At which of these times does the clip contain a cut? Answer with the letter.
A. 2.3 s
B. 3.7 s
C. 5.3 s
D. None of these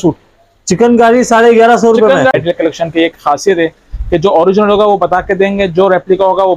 A